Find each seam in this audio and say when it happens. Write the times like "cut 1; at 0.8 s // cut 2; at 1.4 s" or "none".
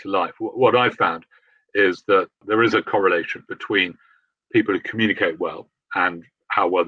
cut 1; at 2.4 s